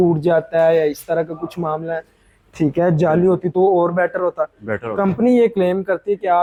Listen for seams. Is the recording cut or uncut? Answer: uncut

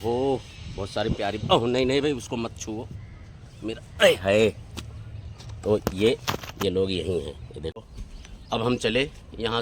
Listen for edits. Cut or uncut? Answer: cut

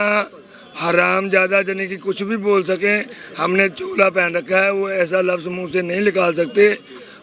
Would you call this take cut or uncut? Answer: uncut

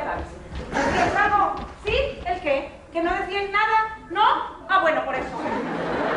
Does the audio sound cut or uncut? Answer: uncut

